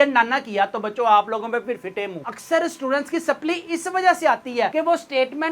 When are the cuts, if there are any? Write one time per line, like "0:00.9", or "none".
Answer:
0:02.3